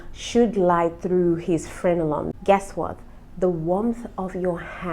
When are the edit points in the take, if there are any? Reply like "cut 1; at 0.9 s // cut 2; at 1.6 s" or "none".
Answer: cut 1; at 1.7 s